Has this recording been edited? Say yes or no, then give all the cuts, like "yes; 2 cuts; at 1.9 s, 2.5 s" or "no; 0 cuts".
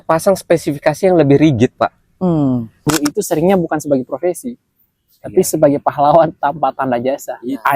yes; 1 cut; at 2.9 s